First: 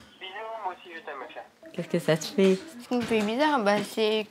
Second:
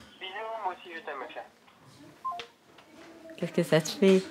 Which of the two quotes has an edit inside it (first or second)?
first